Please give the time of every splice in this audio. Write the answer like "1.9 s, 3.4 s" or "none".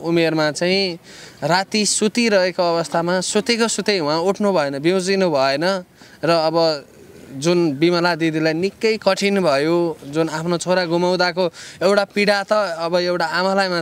none